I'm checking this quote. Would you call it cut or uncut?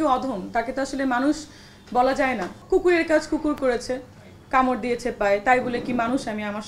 cut